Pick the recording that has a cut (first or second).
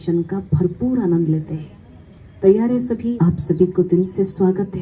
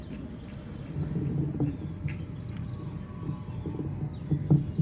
first